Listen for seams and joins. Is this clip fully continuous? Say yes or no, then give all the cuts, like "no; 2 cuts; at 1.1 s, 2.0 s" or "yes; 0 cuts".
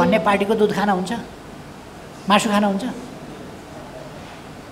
yes; 0 cuts